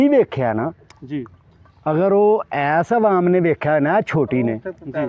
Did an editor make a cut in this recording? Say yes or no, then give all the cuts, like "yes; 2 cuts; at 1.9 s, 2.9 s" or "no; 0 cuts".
no; 0 cuts